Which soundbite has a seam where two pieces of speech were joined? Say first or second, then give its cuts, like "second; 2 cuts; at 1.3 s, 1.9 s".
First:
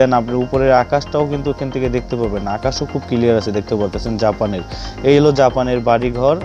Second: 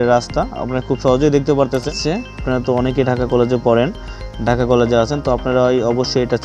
second; 1 cut; at 1.9 s